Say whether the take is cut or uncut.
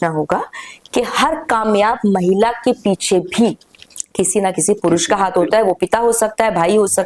uncut